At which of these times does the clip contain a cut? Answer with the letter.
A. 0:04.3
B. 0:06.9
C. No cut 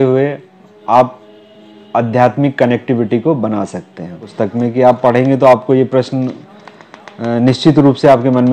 A